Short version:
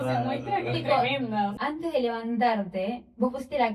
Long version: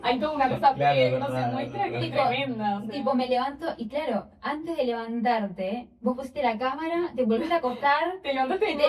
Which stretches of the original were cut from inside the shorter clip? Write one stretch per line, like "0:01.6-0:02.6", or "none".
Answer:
0:02.8-0:04.4